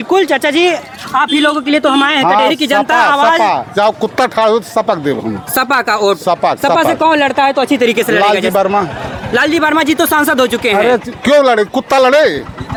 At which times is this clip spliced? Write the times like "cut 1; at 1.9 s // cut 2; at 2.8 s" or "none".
none

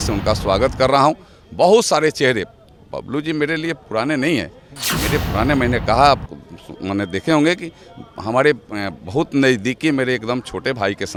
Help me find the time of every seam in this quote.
none

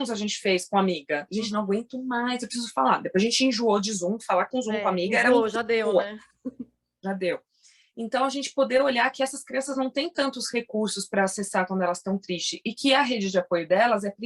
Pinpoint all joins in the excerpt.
none

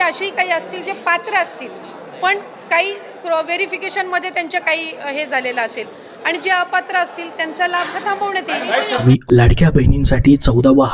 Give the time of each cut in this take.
none

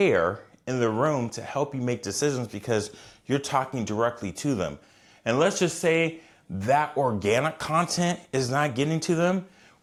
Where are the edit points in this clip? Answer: none

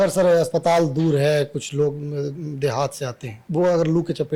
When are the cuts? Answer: cut 1; at 3.4 s

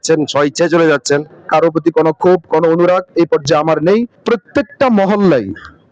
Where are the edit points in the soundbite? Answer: cut 1; at 1.4 s // cut 2; at 4.1 s

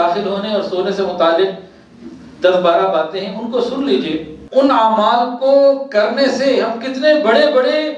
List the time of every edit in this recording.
cut 1; at 4.4 s

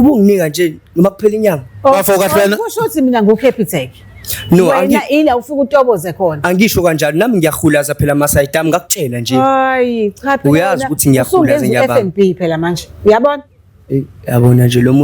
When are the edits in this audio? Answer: none

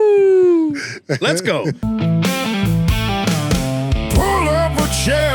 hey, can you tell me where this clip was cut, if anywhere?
cut 1; at 1.8 s

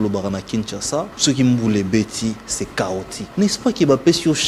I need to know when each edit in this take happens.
cut 1; at 1.1 s // cut 2; at 3.2 s

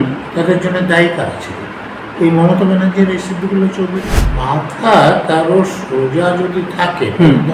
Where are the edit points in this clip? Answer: cut 1; at 4.2 s

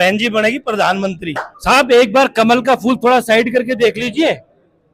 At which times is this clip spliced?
cut 1; at 1.5 s

